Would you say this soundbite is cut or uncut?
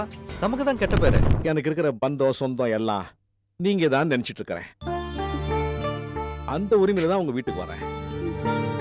cut